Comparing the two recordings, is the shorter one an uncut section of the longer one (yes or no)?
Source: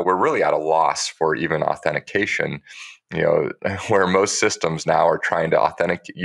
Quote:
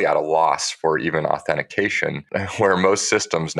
no